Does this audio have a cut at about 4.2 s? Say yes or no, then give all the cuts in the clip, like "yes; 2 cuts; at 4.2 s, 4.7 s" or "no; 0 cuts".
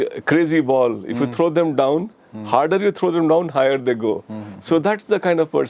no; 0 cuts